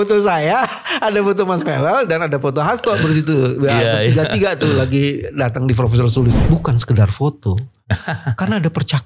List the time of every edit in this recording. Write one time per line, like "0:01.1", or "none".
0:06.4